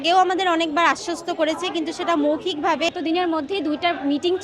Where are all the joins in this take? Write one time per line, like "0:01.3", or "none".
0:02.9